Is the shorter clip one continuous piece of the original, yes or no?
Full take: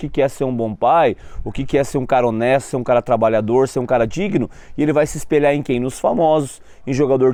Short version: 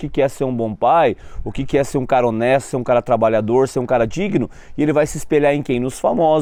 yes